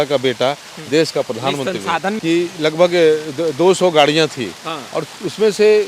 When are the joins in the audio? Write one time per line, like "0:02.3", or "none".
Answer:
0:02.2